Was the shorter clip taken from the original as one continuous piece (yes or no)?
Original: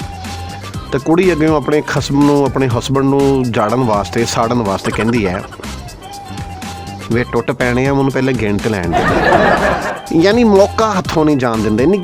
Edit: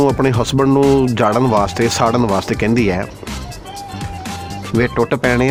yes